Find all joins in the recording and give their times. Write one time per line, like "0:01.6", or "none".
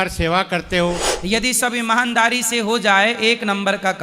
0:01.1